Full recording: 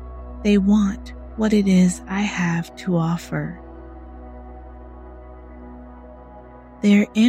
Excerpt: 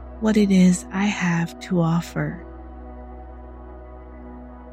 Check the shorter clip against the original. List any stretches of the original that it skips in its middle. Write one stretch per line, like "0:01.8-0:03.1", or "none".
0:03.5-0:03.7